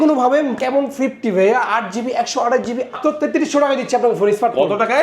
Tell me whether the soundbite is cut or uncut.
cut